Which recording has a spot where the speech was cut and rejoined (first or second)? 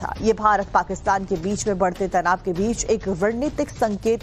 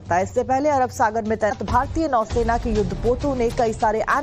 second